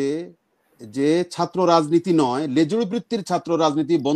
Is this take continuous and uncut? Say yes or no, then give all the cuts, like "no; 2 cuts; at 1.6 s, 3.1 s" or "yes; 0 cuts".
yes; 0 cuts